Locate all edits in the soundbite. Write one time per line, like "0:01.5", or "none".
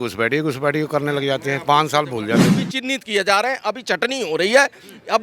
0:02.6

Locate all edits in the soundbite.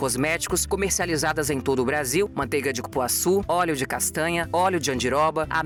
none

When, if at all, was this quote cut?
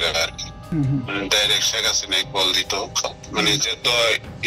0:00.7
0:03.2

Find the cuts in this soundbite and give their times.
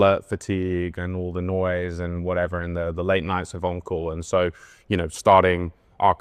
none

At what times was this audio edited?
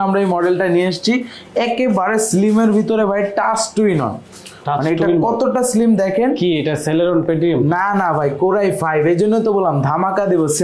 none

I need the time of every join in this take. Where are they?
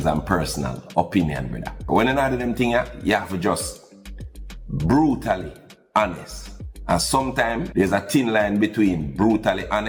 none

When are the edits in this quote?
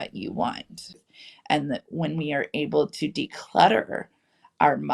0:01.0

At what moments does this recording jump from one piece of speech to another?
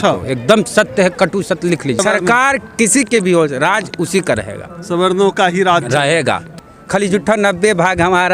0:02.0
0:06.5

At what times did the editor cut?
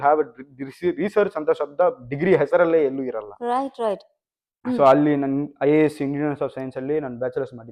none

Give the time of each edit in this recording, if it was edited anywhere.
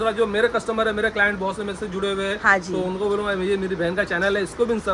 none

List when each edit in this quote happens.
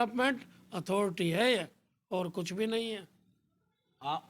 none

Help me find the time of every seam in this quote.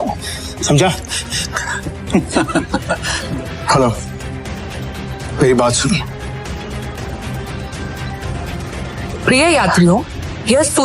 0:03.1
0:07.0

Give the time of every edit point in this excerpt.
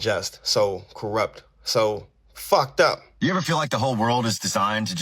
0:03.1

